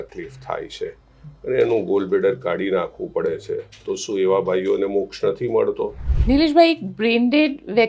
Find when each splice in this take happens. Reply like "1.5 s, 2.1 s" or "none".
6.1 s